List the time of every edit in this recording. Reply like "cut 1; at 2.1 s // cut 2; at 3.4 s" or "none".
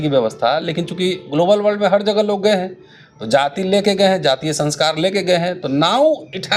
none